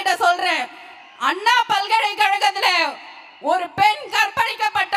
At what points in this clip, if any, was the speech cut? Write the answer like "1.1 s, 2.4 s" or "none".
none